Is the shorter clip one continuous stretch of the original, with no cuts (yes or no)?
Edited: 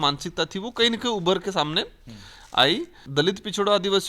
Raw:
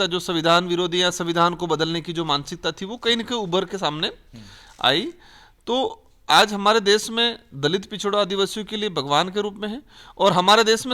no